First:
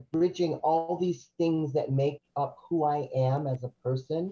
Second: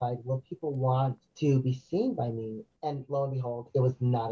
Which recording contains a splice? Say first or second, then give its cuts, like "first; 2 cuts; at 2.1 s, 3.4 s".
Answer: second; 2 cuts; at 1.2 s, 2.7 s